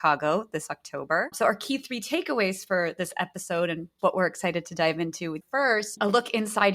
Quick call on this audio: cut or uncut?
cut